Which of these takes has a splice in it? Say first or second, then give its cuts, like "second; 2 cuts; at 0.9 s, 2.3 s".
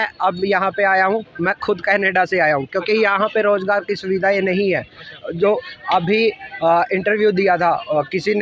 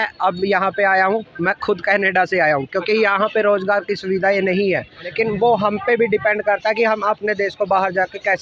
second; 1 cut; at 5.0 s